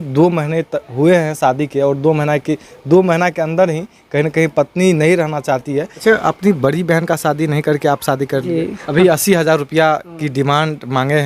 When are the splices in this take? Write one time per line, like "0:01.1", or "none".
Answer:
0:05.9
0:08.8